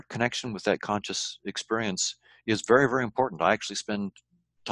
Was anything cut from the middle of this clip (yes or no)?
no